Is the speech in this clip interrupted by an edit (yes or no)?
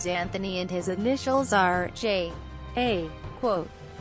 yes